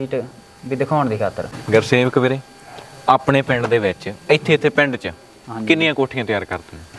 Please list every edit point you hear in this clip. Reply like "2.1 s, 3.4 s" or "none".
1.5 s